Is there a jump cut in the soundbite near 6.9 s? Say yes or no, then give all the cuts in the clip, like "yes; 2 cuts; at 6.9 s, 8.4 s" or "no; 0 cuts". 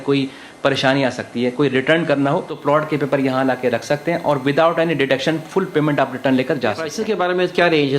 yes; 2 cuts; at 2.5 s, 6.9 s